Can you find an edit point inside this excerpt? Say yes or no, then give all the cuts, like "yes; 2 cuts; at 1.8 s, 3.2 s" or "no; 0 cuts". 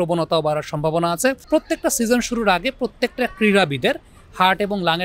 yes; 1 cut; at 1.4 s